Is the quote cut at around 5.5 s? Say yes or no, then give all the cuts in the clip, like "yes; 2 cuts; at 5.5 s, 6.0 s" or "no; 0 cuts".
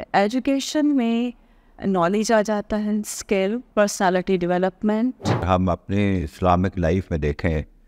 yes; 2 cuts; at 3.6 s, 5.5 s